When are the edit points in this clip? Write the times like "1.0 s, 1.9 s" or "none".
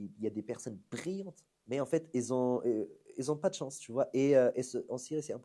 none